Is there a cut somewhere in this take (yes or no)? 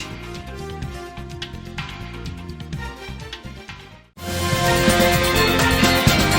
no